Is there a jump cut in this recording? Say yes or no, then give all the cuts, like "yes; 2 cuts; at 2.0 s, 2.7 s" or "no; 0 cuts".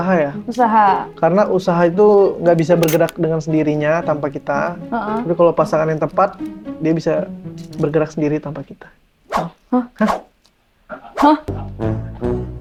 no; 0 cuts